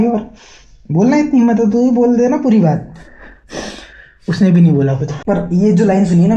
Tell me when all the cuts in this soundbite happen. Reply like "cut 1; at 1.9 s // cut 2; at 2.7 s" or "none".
cut 1; at 5.1 s